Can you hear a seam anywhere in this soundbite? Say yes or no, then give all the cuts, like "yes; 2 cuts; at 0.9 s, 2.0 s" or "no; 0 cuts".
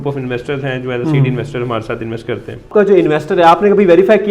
yes; 1 cut; at 2.7 s